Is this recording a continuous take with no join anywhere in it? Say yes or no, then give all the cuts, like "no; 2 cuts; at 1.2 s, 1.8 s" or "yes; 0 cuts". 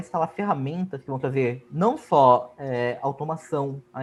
yes; 0 cuts